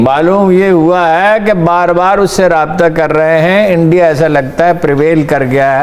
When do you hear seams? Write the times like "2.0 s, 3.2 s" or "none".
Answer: none